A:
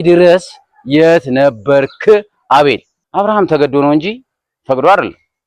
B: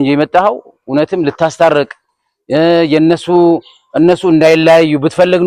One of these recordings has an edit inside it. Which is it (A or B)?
A